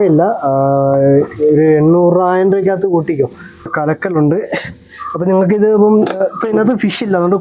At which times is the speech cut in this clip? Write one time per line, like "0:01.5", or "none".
0:03.7